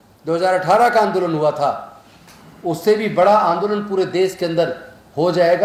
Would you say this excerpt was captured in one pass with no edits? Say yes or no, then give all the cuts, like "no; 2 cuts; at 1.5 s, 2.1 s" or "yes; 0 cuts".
yes; 0 cuts